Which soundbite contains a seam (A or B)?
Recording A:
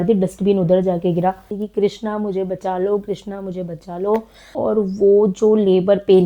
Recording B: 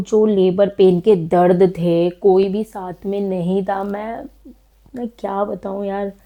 A